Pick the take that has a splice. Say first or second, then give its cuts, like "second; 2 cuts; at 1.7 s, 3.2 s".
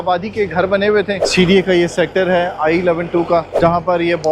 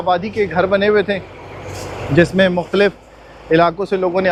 first; 2 cuts; at 1.2 s, 3.5 s